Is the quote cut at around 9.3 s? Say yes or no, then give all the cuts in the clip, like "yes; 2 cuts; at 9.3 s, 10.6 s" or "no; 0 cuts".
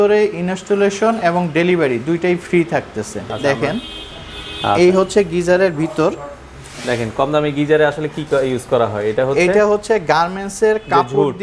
no; 1 cut; at 3.3 s